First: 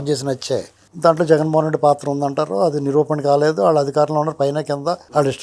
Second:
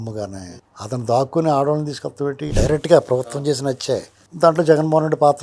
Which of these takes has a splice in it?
second; 1 cut; at 2.4 s

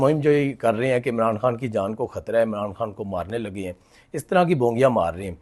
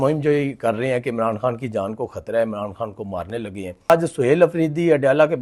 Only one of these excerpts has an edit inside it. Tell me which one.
second; 1 cut; at 3.9 s

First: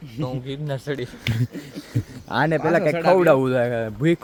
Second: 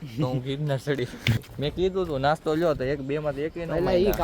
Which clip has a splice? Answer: second; 1 cut; at 1.4 s

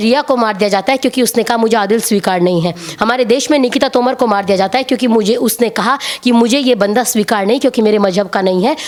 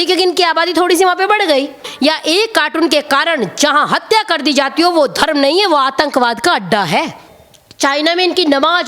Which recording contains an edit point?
second; 2 cuts; at 1.9 s, 7.3 s

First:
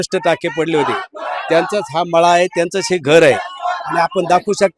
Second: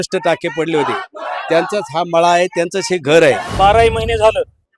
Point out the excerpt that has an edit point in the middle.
second; 1 cut; at 3.5 s

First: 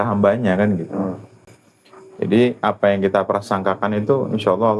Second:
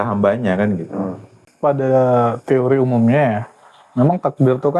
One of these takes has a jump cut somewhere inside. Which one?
second; 1 cut; at 1.4 s

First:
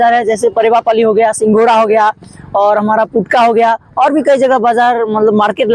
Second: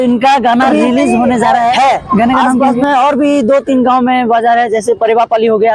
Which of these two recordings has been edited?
second; 1 cut; at 2.8 s

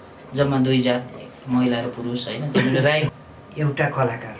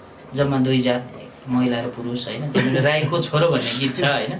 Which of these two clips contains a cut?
first; 1 cut; at 3.1 s

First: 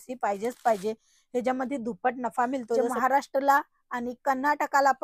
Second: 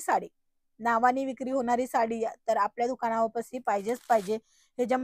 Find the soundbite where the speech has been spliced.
first; 1 cut; at 2.8 s

